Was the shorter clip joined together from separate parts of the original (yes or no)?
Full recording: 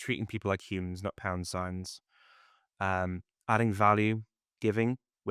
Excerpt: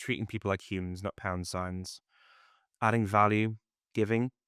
yes